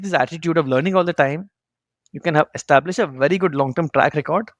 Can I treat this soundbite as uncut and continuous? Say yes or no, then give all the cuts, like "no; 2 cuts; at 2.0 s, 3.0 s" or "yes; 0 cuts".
yes; 0 cuts